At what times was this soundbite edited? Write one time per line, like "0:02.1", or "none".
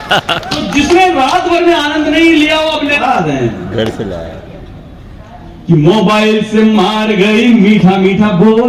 0:03.0